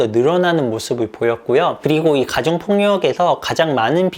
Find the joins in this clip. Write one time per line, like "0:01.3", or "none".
none